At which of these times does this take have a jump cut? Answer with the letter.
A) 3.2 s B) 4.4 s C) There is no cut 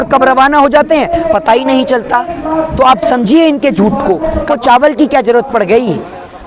B